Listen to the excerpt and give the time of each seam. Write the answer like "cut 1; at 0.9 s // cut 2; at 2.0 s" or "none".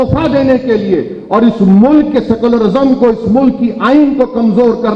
none